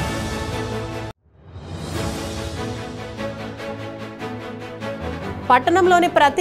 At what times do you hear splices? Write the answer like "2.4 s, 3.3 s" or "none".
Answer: 1.0 s, 5.2 s